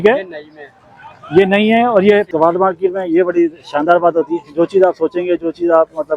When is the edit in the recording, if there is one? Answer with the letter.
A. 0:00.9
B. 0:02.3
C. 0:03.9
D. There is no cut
B